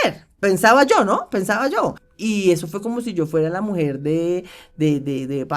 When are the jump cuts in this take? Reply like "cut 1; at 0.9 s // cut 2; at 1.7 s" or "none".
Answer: cut 1; at 2.1 s